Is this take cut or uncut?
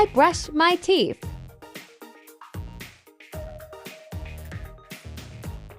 cut